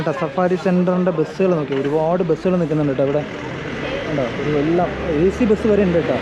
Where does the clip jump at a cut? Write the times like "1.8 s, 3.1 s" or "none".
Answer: none